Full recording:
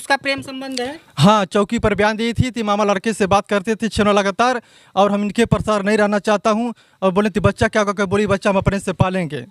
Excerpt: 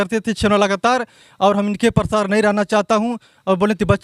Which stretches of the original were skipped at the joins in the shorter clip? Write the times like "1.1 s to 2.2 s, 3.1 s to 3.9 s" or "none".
none